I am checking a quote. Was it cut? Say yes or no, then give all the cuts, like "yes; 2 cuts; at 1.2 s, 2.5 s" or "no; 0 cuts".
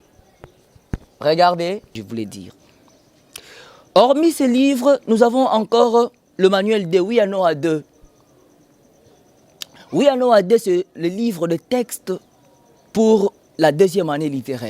yes; 1 cut; at 2.0 s